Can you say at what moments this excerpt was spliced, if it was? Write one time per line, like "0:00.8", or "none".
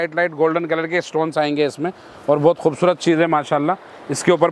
none